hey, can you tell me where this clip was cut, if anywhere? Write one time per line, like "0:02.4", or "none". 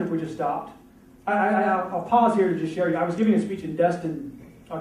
none